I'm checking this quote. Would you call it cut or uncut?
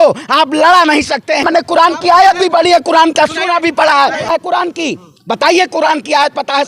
cut